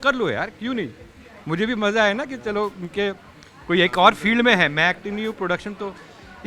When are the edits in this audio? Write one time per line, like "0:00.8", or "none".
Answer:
none